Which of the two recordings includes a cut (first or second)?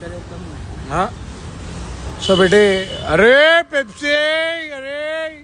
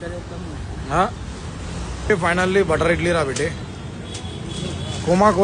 second